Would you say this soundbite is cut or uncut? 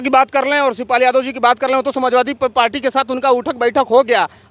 uncut